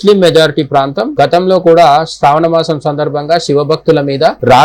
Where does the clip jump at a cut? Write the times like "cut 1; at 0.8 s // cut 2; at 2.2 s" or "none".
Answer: cut 1; at 1.0 s